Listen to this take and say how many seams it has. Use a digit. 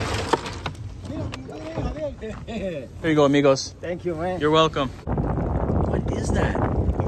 1